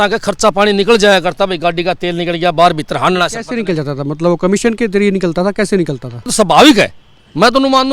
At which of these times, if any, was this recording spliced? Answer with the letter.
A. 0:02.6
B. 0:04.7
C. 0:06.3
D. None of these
C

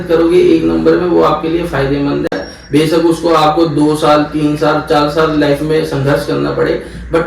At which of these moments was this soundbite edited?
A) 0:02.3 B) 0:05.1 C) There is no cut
C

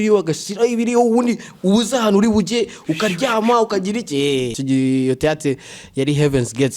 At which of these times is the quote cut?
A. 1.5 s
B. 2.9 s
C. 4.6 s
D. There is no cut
C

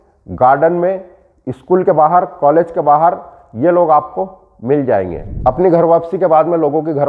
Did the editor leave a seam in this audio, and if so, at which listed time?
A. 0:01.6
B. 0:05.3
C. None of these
B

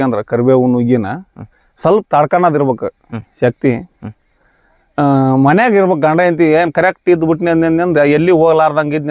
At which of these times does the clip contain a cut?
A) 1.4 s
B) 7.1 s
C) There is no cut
C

